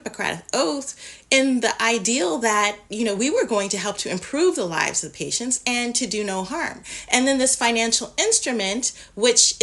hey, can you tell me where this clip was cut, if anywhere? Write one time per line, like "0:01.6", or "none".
none